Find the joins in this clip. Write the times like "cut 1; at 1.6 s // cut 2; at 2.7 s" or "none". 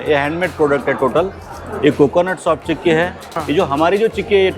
cut 1; at 3.4 s